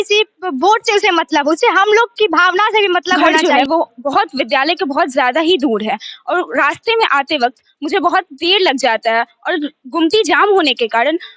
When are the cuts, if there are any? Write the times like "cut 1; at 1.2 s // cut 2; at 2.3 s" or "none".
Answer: cut 1; at 3.3 s